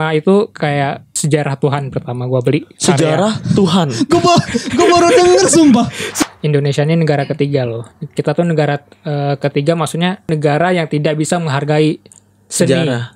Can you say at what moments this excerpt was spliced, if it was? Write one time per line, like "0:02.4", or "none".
0:01.1
0:06.0
0:10.3